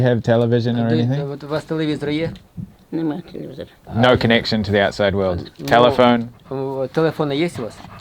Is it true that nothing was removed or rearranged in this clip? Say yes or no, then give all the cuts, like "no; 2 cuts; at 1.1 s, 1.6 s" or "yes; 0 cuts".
no; 1 cut; at 3.8 s